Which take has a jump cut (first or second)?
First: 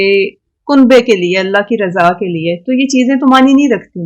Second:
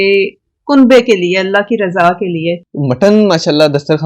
second